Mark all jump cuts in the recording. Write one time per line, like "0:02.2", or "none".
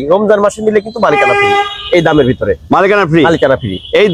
none